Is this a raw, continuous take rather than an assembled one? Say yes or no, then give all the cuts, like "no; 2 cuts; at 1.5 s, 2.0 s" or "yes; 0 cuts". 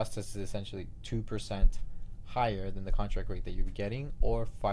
yes; 0 cuts